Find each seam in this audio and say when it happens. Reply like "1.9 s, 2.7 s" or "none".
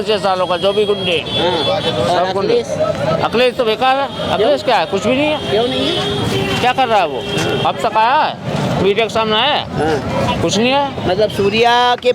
none